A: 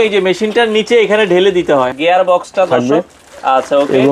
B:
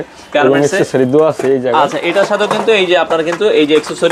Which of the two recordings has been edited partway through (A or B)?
A